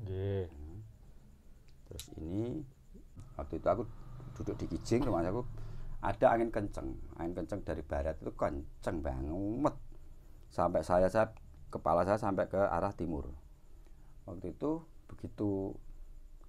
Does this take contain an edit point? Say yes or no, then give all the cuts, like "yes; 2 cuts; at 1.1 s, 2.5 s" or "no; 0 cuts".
yes; 1 cut; at 3.3 s